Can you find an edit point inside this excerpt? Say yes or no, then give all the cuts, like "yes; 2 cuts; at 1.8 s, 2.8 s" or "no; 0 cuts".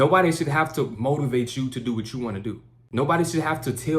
yes; 1 cut; at 2.7 s